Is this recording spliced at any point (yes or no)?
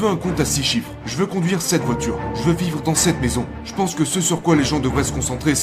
yes